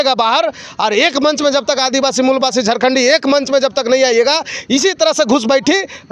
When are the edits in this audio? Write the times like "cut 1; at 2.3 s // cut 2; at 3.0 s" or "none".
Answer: none

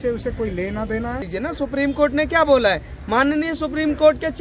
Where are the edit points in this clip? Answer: cut 1; at 1.3 s

